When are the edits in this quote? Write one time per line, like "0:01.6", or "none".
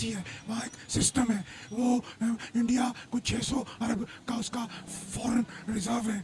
none